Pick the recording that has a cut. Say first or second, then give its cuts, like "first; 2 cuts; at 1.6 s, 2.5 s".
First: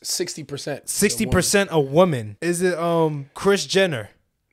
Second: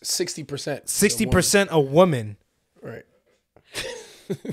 first; 2 cuts; at 2.3 s, 3.3 s